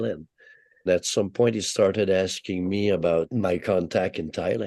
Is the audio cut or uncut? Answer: cut